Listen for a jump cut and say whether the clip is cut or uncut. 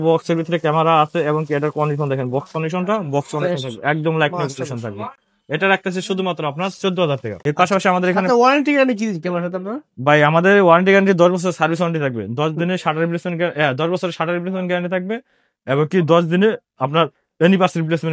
uncut